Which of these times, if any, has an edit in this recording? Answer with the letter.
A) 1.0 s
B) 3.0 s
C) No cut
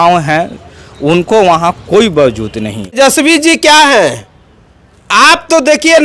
B